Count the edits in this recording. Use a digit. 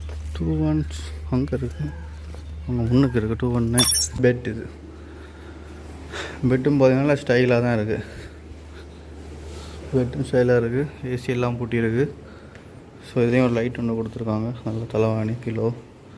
1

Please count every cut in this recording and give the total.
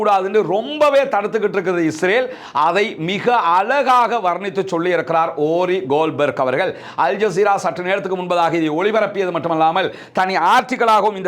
0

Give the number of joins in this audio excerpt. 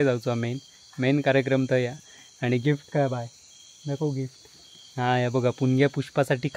0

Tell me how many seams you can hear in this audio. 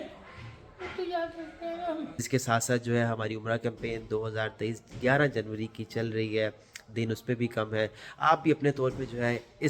1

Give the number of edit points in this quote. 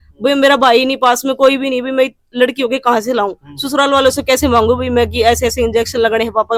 0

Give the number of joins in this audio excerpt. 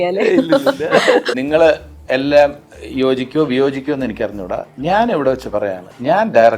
1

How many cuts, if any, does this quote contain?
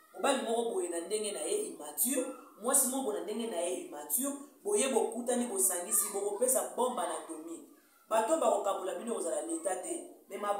0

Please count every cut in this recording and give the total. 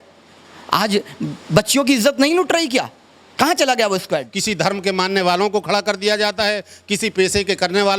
1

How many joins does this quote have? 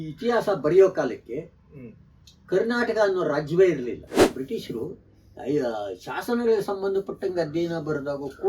1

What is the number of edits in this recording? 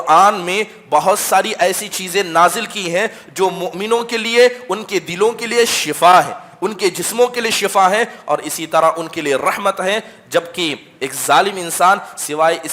0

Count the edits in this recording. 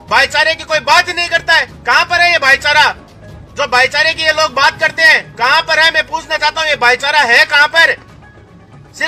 0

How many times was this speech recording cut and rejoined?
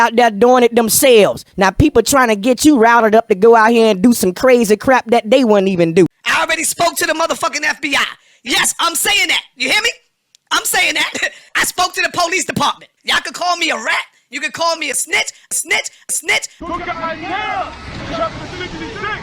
1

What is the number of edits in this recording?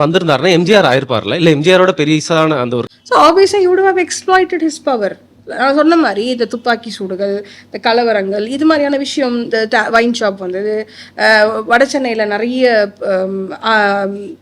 1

